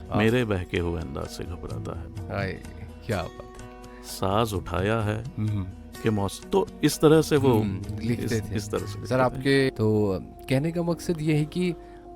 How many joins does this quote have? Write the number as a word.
one